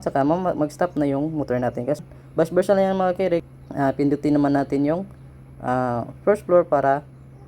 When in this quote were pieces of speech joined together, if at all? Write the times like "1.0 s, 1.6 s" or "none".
2.0 s, 3.5 s